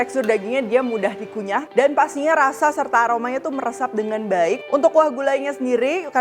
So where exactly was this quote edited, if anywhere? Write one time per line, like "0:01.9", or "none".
0:01.7
0:04.6